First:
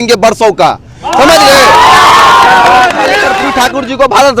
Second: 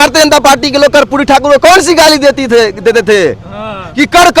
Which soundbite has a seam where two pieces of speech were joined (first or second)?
first